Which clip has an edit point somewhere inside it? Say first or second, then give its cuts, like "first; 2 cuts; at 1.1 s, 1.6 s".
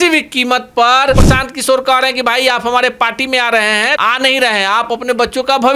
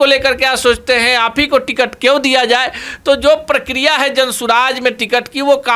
first; 2 cuts; at 1.2 s, 4.0 s